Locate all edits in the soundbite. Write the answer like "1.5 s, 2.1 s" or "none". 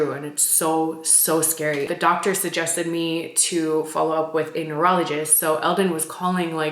1.9 s